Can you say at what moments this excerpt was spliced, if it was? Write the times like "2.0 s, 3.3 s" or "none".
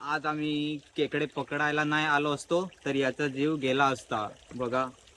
none